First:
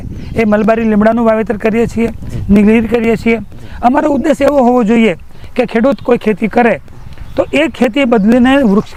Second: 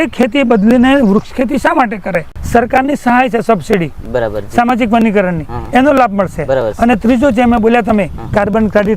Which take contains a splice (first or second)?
second